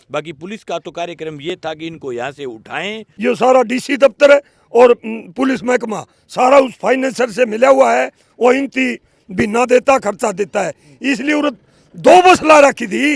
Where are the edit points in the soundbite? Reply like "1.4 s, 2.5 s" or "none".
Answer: 3.0 s